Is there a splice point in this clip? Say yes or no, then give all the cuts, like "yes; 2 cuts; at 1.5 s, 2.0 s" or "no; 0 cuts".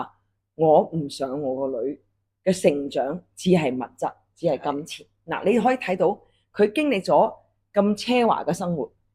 no; 0 cuts